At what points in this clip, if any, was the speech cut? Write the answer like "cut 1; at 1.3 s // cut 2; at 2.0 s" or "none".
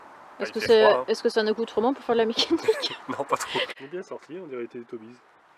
cut 1; at 3.7 s